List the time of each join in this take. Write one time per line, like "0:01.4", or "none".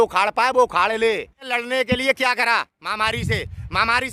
0:01.5